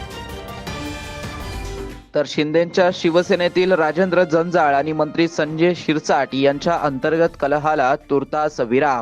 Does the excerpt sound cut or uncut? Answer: cut